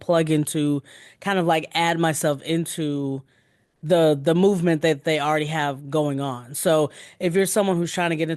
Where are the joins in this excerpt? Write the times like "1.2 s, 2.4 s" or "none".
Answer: none